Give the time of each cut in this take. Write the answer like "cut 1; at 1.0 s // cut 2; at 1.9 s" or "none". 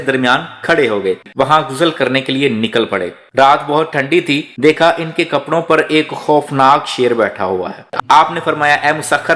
cut 1; at 1.2 s // cut 2; at 7.9 s